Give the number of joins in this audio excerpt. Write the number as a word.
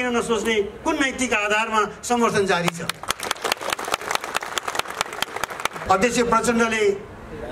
one